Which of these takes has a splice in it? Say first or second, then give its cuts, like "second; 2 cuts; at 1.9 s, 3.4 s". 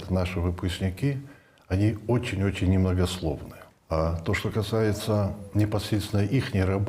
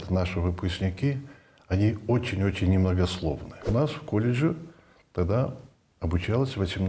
second; 1 cut; at 3.5 s